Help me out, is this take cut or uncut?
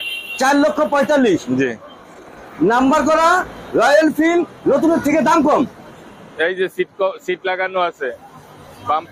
uncut